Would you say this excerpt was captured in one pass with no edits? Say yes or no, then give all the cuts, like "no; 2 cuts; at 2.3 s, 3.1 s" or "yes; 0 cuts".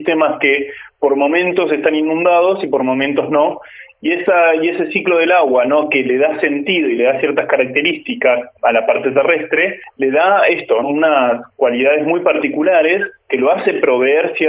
no; 4 cuts; at 8.5 s, 9.8 s, 10.8 s, 13.2 s